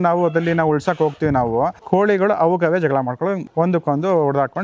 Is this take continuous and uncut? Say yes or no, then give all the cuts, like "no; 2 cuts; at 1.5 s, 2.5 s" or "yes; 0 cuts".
no; 2 cuts; at 1.8 s, 3.4 s